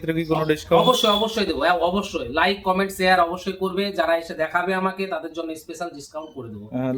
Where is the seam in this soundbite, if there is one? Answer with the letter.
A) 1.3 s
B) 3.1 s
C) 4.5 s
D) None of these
D